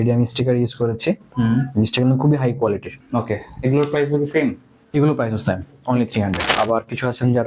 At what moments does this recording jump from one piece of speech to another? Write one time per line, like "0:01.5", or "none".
0:02.9
0:06.5